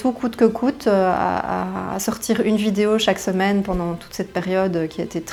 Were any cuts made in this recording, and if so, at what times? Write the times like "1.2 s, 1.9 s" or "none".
none